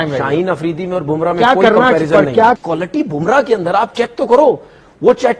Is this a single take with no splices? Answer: no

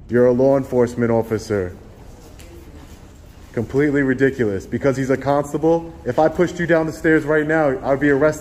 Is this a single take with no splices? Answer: yes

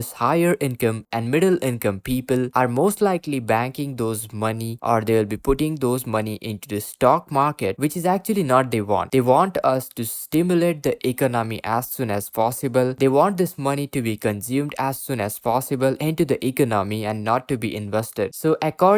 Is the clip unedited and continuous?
yes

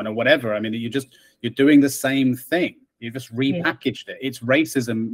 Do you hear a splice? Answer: no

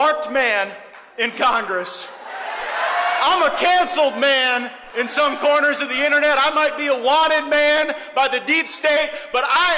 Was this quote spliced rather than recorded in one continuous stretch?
no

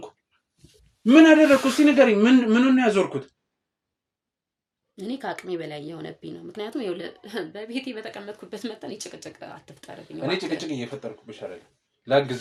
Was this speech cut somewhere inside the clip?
no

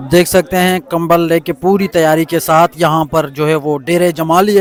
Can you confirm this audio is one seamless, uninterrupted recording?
yes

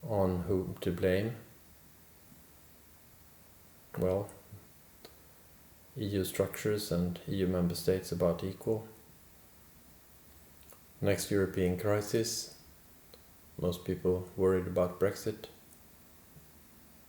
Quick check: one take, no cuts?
no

